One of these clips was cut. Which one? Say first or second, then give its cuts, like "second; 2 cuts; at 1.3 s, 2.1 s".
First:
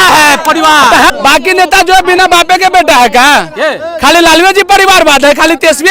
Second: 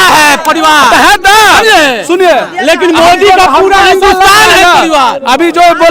first; 1 cut; at 1.1 s